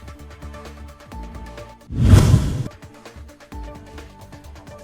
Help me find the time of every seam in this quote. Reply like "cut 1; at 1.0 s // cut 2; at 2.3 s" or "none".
cut 1; at 1.3 s